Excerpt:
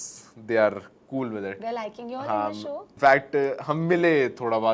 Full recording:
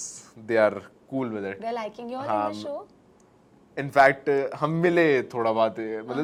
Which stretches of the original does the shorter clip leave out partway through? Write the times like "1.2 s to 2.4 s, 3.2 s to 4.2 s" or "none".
2.9 s to 3.9 s